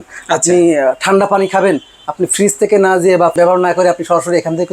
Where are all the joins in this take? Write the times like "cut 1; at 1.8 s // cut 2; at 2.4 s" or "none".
cut 1; at 3.3 s